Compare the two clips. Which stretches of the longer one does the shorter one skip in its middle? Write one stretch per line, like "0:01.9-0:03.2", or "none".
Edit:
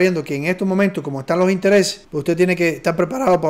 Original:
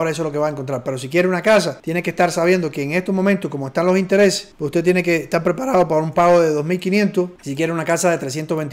none

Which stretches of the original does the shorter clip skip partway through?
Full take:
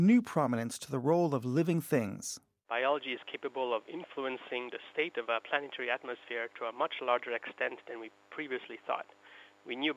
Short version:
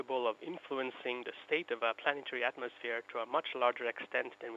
none

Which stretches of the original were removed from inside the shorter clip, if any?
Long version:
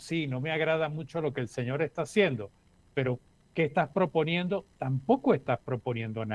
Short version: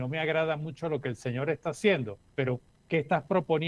0:02.9-0:03.2

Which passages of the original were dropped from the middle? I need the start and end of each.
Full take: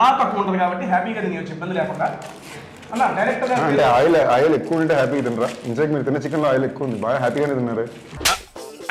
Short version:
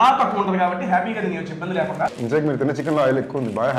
0:02.2-0:05.6

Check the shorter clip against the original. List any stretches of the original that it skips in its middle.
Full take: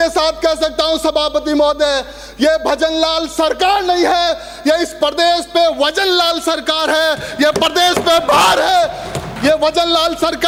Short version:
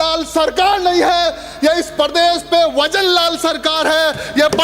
none

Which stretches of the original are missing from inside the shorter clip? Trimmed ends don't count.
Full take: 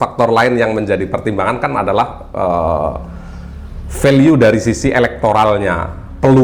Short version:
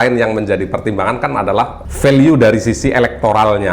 0:02.2-0:03.8

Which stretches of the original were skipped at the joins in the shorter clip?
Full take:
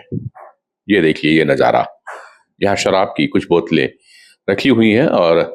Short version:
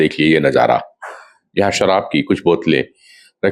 none

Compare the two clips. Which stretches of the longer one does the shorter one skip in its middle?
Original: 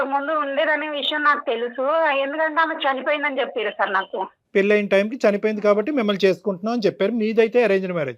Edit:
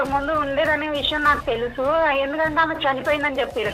none

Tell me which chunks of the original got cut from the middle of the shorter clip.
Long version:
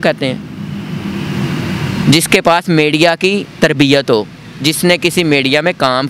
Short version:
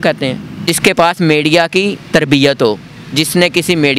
0:01.0-0:02.5

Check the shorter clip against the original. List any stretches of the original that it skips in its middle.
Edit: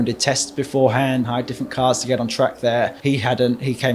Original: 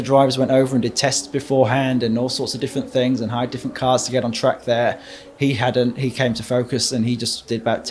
0:02.0-0:03.3
0:05.0-0:05.3

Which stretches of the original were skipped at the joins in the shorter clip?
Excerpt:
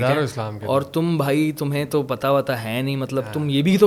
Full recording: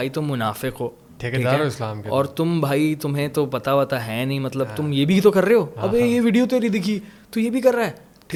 none

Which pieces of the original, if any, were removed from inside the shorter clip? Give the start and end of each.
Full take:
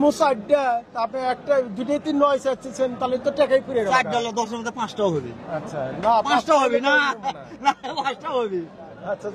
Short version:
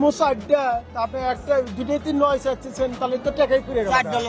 none

